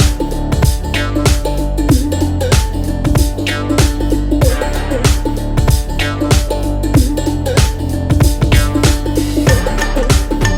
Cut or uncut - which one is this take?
uncut